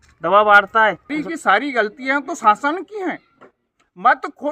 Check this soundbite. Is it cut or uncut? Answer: cut